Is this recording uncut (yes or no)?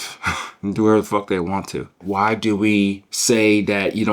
no